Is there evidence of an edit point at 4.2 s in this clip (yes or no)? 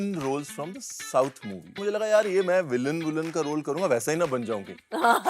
no